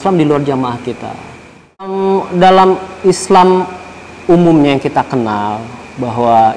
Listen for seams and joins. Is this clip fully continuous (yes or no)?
no